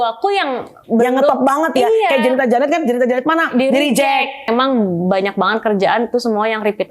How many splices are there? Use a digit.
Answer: 1